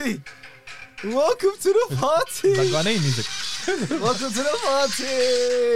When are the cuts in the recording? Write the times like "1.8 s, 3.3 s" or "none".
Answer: 3.5 s